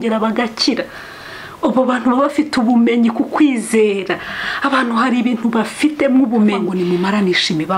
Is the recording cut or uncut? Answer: cut